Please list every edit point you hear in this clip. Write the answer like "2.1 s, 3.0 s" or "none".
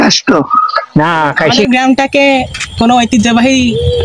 1.7 s